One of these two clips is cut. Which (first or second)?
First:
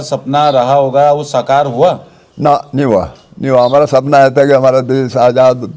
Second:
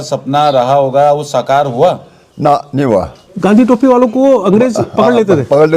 second